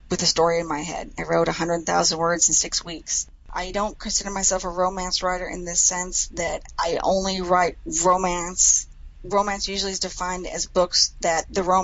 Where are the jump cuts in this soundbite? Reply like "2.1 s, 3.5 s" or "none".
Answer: 3.5 s